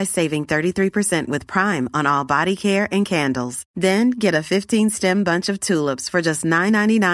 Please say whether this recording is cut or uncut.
uncut